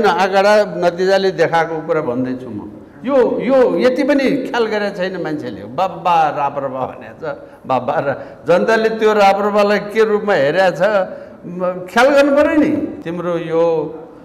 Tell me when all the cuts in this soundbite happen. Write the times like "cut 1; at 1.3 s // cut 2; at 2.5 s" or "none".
cut 1; at 13.0 s